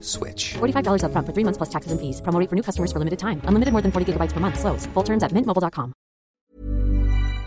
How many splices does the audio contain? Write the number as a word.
one